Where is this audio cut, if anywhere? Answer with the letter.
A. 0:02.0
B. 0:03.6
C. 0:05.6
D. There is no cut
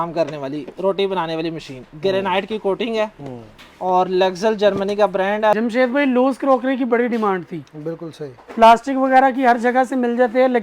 C